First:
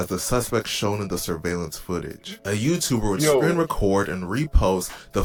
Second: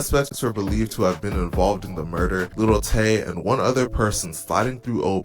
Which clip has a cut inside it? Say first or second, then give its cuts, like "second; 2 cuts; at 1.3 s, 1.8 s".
second; 1 cut; at 2.5 s